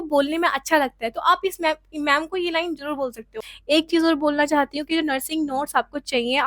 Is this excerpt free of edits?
no; 1 cut; at 3.5 s

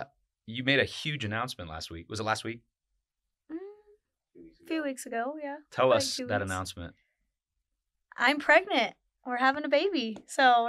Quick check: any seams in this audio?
no; 0 cuts

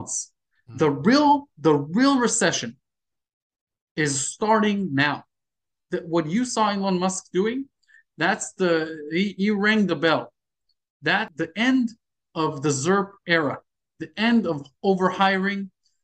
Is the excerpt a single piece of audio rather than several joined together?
no; 1 cut; at 11.3 s

